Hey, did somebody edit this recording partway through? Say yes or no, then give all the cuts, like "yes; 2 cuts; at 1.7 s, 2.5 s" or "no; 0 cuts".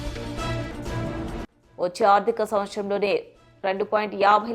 yes; 1 cut; at 1.4 s